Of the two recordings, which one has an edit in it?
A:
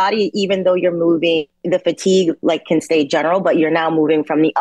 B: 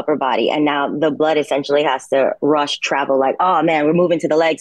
A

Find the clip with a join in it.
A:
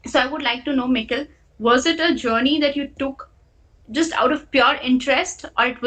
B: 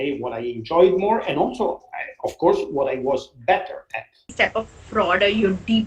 B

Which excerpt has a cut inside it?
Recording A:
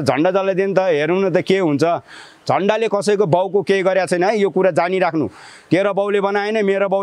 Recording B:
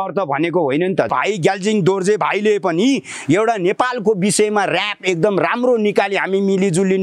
B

